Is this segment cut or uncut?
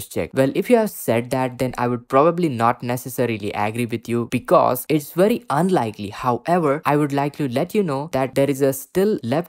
uncut